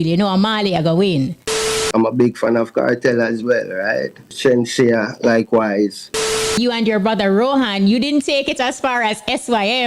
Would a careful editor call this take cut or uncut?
cut